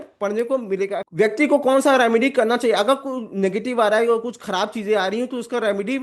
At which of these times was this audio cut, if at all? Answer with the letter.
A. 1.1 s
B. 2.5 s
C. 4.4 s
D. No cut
A